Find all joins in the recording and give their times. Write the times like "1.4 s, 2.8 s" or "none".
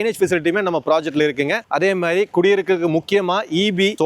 none